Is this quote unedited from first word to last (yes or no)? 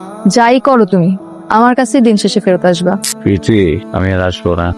no